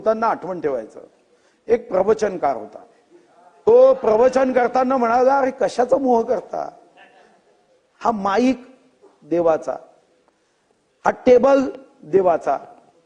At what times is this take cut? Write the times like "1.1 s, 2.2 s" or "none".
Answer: none